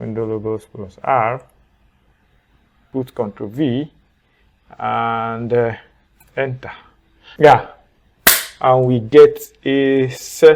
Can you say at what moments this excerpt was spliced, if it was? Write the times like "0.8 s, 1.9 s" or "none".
2.7 s, 7.3 s